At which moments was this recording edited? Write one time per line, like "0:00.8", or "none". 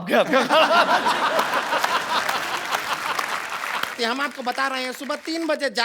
0:03.9

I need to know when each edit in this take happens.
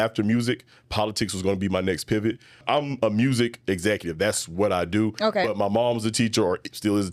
0:02.6

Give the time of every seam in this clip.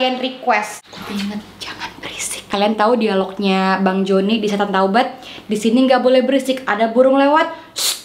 0:00.9
0:02.3

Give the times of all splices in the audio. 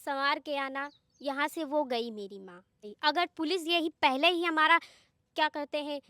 0:02.9

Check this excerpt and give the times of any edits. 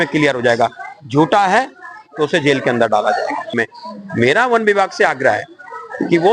0:03.5

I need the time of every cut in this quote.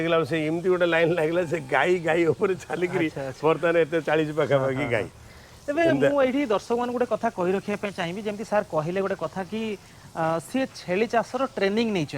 none

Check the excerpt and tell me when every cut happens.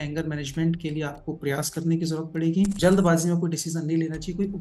0:02.8

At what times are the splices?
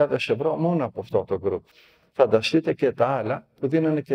0:01.7

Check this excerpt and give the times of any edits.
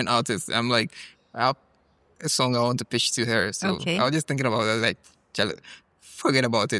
none

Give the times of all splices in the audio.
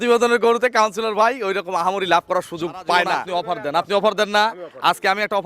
0:03.3

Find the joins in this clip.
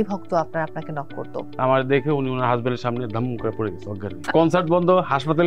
0:01.5
0:04.2

